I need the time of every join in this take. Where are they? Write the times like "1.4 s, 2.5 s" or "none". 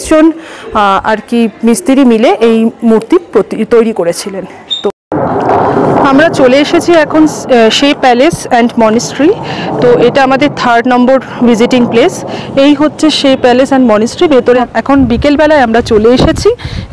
4.9 s, 14.6 s